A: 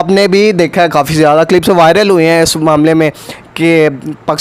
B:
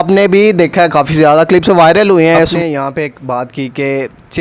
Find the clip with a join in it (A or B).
B